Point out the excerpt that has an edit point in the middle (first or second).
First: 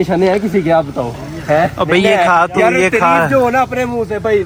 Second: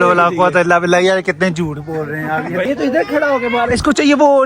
second